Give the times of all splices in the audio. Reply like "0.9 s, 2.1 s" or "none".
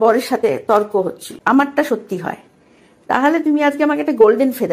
1.3 s